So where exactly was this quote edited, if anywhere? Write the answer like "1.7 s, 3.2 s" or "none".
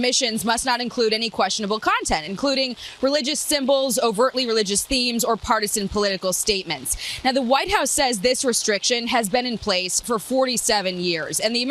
none